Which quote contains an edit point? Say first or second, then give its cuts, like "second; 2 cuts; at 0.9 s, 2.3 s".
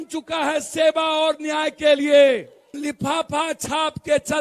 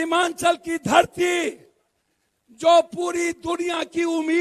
first; 1 cut; at 2.7 s